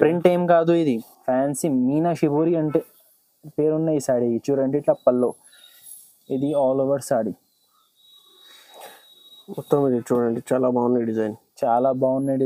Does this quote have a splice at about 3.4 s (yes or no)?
no